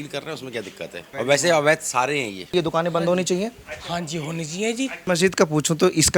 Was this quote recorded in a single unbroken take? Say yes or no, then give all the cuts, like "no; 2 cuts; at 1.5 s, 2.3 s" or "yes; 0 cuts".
no; 3 cuts; at 1.0 s, 2.5 s, 5.0 s